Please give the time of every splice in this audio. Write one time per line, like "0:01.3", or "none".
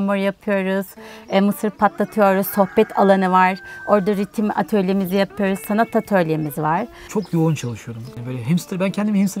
0:07.0
0:08.1